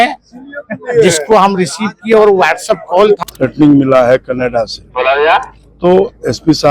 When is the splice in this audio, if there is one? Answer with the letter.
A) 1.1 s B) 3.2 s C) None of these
B